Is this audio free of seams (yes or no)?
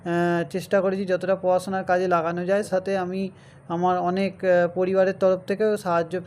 no